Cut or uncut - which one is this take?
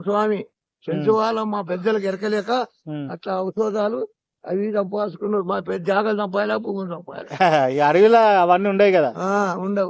uncut